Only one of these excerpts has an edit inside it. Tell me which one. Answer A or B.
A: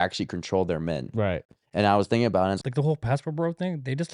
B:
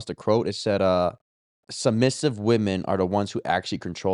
A